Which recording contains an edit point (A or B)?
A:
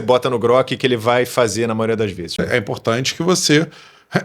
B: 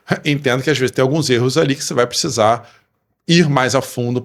A